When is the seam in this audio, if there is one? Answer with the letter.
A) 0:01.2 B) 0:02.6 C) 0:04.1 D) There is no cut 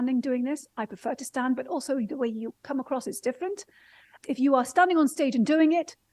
C